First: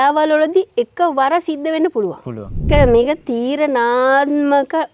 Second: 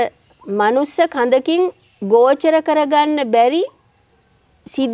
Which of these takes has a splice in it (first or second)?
first